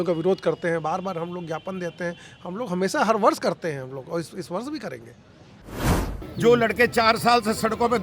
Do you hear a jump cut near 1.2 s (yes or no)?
no